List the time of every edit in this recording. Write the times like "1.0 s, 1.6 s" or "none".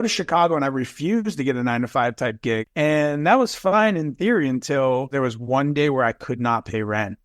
2.6 s, 5.1 s